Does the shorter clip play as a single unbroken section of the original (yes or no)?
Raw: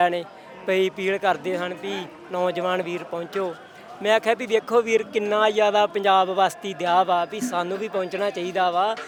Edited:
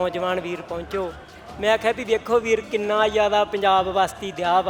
yes